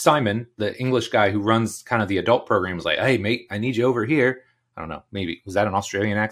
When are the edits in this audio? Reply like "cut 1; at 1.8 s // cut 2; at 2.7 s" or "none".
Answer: none